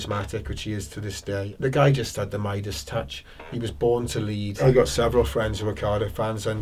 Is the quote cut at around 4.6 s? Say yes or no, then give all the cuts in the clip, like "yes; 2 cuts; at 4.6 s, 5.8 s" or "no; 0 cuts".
yes; 2 cuts; at 1.5 s, 4.6 s